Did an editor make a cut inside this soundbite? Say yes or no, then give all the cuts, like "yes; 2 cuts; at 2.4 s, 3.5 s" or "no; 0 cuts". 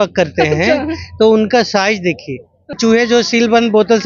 yes; 1 cut; at 2.8 s